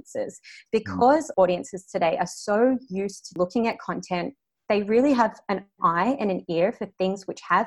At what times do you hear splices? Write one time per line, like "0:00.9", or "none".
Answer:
0:03.2